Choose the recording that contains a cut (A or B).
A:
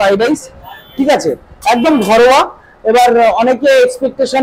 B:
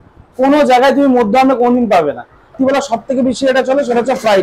B